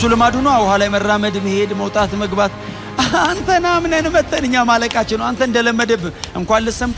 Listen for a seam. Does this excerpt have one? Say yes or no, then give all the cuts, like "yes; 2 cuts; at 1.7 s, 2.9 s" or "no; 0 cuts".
no; 0 cuts